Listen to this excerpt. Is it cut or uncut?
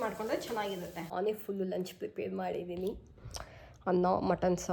cut